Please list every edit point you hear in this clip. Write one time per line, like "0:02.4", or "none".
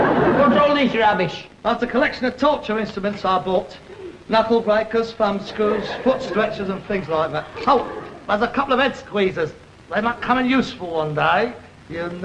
0:08.8